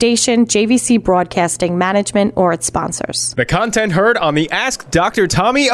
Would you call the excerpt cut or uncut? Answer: cut